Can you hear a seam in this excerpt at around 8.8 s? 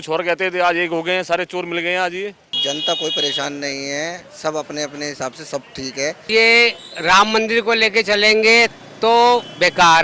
no; 2 cuts; at 2.5 s, 6.3 s

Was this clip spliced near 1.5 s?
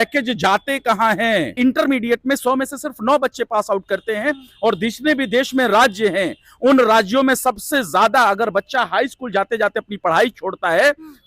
yes; 1 cut; at 1.5 s

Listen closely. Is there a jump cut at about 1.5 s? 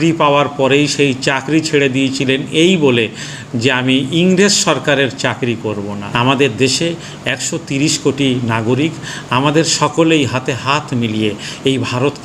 no; 1 cut; at 6.0 s

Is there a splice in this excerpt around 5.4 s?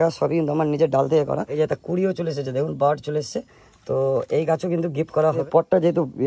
yes; 2 cuts; at 1.5 s, 5.4 s

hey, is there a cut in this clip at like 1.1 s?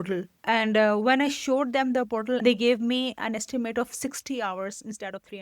no; 1 cut; at 2.4 s

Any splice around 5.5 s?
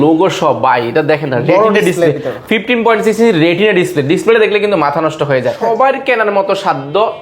yes; 1 cut; at 5.5 s

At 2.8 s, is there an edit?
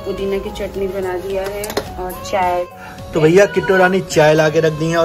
yes; 1 cut; at 2.8 s

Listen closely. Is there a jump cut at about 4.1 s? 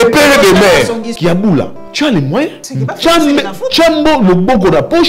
no; 2 cuts; at 1.3 s, 2.7 s

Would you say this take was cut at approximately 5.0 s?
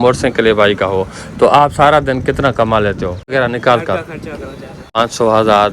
yes; 2 cuts; at 3.3 s, 5.0 s

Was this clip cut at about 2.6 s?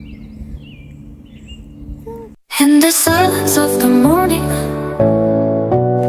yes; 1 cut; at 2.6 s

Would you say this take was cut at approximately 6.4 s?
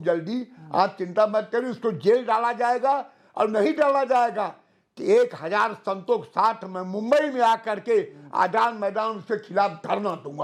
no; 0 cuts

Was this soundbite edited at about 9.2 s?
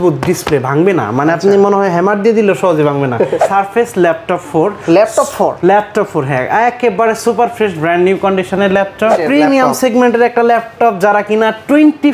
yes; 2 cuts; at 3.4 s, 9.2 s

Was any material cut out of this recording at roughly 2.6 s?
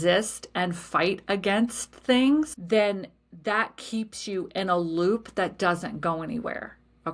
yes; 1 cut; at 2.6 s

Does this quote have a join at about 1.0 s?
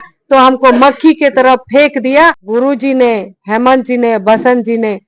no; 1 cut; at 2.4 s

